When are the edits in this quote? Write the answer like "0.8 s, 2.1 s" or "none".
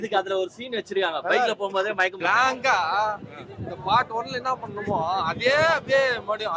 2.1 s